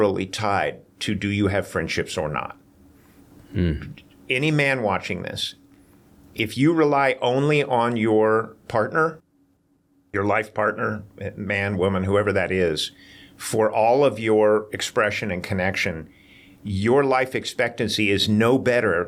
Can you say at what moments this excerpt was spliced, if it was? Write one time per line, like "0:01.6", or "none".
none